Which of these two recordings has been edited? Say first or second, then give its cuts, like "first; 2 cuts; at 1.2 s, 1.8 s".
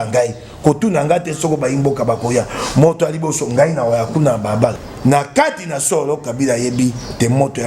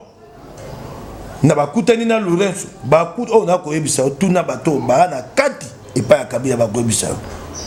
first; 1 cut; at 4.8 s